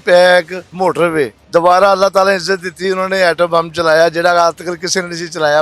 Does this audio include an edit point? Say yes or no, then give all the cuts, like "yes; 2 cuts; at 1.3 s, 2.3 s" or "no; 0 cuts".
yes; 1 cut; at 0.9 s